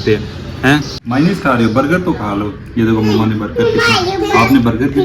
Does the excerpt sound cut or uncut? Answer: cut